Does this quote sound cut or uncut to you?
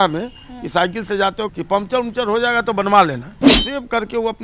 cut